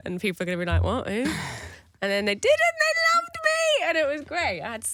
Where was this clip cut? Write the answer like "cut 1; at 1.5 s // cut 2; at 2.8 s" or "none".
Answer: none